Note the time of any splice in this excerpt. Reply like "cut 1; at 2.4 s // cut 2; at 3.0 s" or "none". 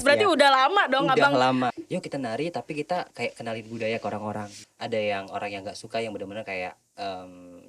cut 1; at 1.7 s // cut 2; at 4.6 s